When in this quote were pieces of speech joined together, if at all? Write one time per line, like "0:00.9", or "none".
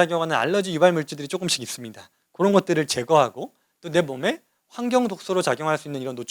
none